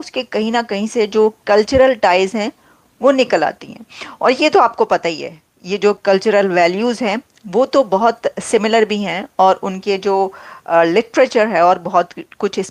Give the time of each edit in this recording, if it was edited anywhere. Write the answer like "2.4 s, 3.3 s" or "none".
none